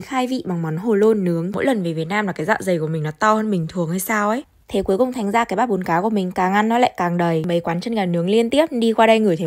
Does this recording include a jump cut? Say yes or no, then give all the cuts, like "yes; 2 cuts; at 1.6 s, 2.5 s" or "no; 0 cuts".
yes; 3 cuts; at 1.5 s, 4.5 s, 7.5 s